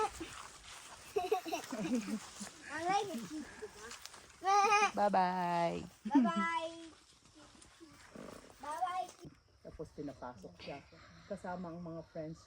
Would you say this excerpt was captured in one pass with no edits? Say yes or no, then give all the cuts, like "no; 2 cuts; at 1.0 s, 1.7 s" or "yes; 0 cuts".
no; 1 cut; at 9.3 s